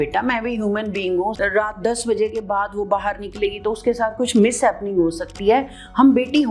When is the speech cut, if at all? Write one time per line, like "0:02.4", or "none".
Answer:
0:01.4